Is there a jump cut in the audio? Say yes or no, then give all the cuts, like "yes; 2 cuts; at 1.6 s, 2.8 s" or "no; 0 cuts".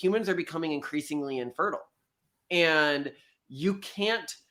no; 0 cuts